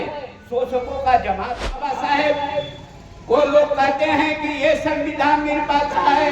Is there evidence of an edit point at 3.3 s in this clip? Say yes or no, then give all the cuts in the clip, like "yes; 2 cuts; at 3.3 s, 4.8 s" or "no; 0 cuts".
no; 1 cut; at 1.7 s